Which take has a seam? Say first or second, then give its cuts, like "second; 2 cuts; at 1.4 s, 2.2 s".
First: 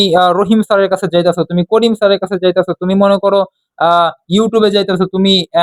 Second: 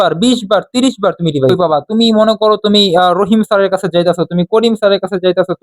second; 1 cut; at 1.5 s